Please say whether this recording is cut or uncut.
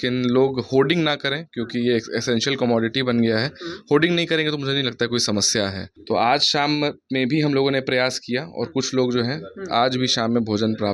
cut